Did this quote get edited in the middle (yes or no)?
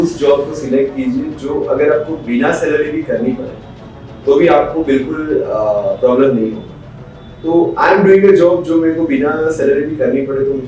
no